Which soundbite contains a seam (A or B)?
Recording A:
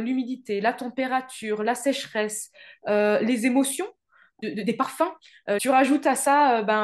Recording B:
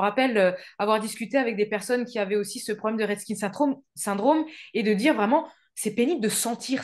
A